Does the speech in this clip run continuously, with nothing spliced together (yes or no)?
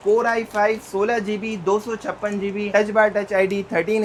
yes